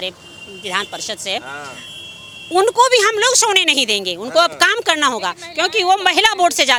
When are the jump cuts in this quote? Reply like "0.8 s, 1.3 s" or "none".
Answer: none